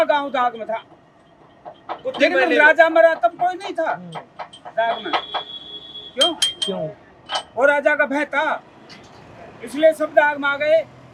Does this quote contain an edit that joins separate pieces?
no; 0 cuts

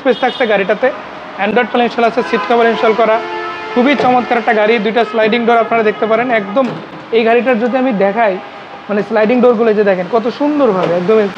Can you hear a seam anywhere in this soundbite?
no; 0 cuts

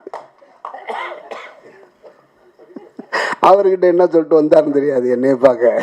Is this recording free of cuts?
yes; 0 cuts

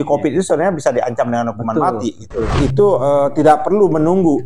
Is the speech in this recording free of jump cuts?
no; 1 cut; at 2.5 s

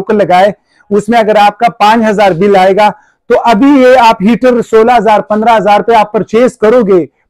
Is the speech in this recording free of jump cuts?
yes; 0 cuts

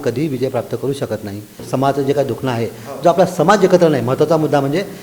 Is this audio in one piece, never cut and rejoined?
no; 1 cut; at 1.6 s

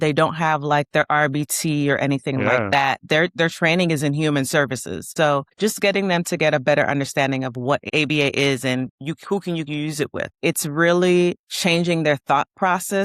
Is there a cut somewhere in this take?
yes; 4 cuts; at 5.0 s, 7.8 s, 9.0 s, 10.3 s

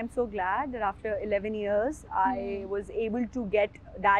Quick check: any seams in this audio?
no; 0 cuts

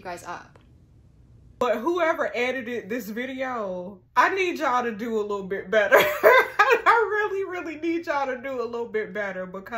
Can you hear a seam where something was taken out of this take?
yes; 1 cut; at 1.6 s

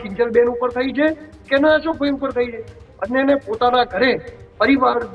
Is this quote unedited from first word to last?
yes; 0 cuts

